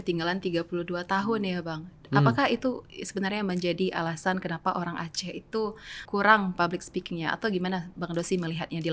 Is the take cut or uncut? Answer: cut